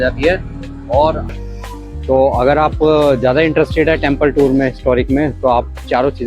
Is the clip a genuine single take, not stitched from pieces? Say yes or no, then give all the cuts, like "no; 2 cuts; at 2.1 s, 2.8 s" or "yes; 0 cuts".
no; 1 cut; at 1.3 s